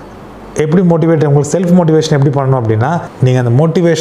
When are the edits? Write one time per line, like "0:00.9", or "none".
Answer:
0:03.1